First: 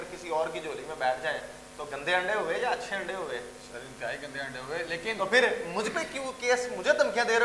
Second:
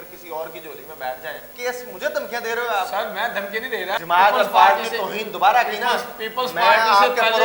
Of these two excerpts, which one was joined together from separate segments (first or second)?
second